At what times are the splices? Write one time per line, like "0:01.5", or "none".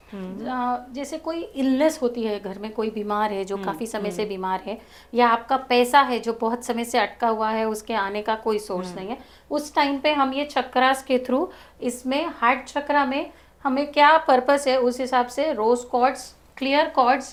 none